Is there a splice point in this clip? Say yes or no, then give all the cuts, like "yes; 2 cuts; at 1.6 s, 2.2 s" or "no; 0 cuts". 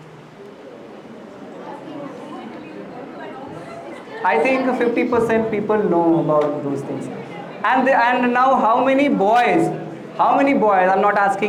no; 0 cuts